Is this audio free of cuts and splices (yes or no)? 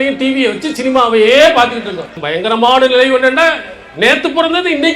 no